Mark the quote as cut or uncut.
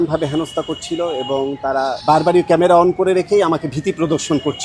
cut